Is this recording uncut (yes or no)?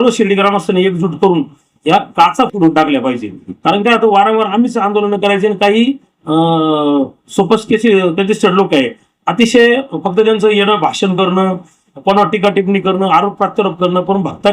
yes